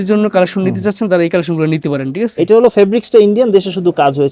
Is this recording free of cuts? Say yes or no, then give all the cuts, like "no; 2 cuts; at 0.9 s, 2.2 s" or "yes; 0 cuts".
yes; 0 cuts